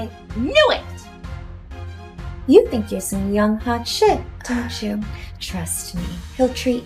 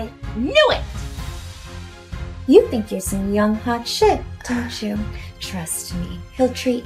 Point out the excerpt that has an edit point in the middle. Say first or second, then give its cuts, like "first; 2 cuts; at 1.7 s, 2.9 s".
second; 2 cuts; at 0.8 s, 2.4 s